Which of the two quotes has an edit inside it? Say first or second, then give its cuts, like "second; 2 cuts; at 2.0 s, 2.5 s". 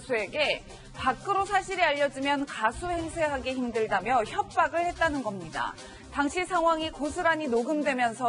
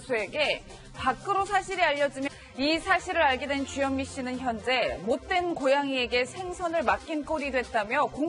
first; 1 cut; at 2.3 s